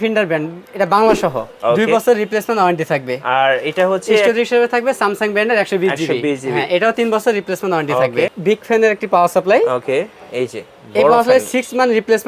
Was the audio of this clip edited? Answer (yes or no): yes